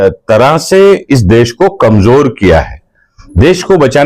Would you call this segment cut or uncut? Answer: uncut